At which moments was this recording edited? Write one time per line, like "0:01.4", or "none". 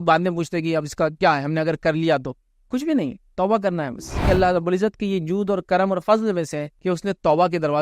0:04.3
0:06.7